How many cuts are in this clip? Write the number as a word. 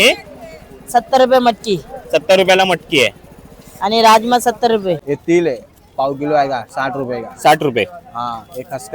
one